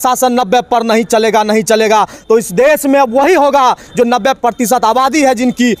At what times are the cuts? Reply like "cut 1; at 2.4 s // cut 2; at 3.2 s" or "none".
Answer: none